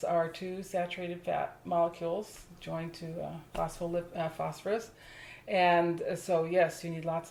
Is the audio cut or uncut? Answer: uncut